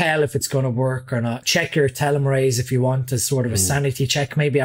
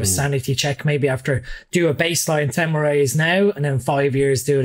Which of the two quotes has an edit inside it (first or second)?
first